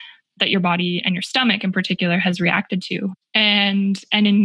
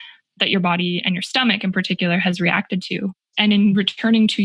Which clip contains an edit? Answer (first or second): second